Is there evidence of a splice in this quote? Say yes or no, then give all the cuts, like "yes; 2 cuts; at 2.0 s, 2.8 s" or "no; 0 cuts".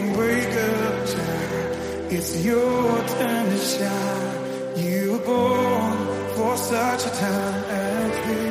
no; 0 cuts